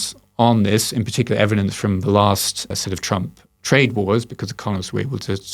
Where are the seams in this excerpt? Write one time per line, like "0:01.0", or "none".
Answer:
0:02.7